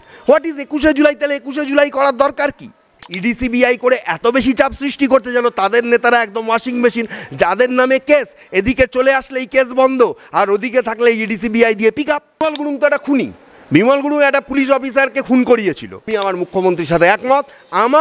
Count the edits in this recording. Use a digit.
3